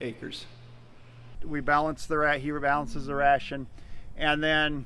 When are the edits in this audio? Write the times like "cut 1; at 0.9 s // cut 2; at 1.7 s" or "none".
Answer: cut 1; at 1.4 s